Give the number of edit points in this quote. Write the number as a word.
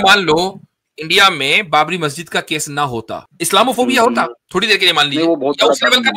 two